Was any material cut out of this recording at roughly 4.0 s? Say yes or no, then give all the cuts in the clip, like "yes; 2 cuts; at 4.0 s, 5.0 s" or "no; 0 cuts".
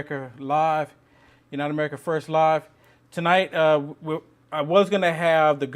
no; 1 cut; at 1.7 s